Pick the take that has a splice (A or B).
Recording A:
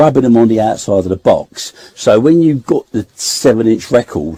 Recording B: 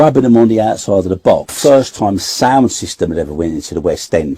B